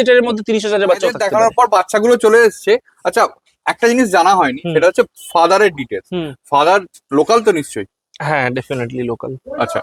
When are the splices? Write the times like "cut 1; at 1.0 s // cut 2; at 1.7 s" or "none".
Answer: none